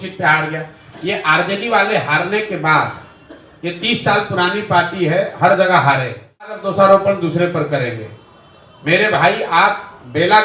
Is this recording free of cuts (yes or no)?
no